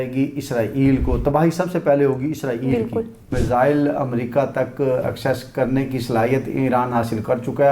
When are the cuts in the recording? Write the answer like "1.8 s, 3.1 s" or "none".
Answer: 3.3 s